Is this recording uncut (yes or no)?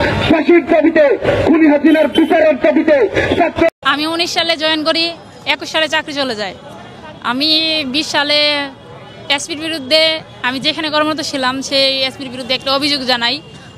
no